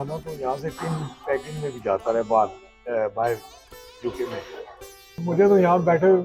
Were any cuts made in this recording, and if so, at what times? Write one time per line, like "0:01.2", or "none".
0:05.2